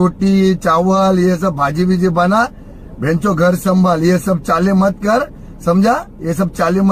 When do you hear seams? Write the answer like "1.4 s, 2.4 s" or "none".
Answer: none